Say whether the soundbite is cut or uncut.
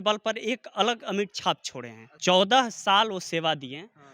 cut